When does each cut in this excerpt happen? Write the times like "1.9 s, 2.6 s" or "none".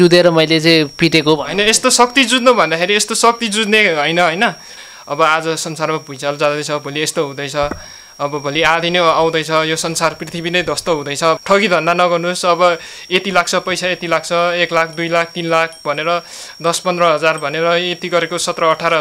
4.7 s, 11.4 s